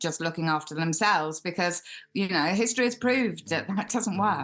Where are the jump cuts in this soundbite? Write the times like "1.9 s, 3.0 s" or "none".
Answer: none